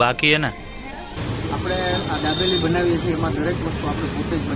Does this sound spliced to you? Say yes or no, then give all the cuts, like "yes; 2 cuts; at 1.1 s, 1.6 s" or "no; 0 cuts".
yes; 1 cut; at 1.2 s